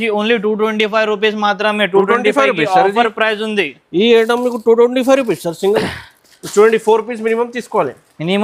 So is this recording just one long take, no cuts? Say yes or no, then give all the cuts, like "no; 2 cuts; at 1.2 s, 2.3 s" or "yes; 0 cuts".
yes; 0 cuts